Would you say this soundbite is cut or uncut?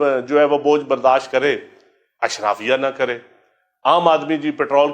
uncut